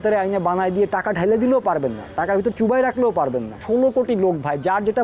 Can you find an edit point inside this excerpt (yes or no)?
yes